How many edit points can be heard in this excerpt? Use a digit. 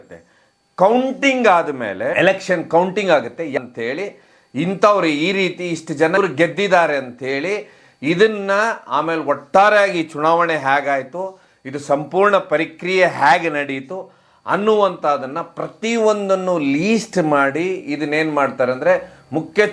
0